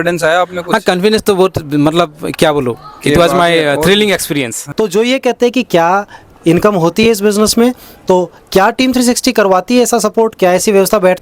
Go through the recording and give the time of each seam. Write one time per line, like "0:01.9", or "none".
0:04.6